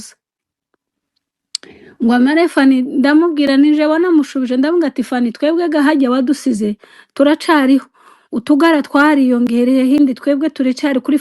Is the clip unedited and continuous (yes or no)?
no